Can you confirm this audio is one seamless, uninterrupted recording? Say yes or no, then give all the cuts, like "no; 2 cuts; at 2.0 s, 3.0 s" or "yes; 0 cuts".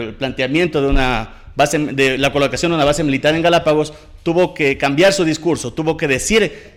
yes; 0 cuts